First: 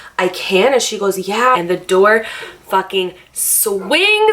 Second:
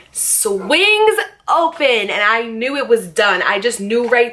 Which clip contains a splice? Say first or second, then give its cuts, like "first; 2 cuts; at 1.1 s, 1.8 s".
first; 1 cut; at 1.6 s